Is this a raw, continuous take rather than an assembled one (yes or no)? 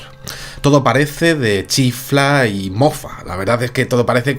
no